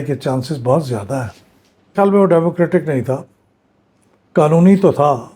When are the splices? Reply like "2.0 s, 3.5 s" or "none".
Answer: 1.9 s